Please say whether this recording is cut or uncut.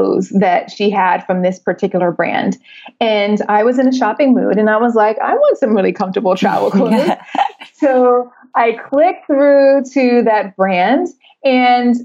uncut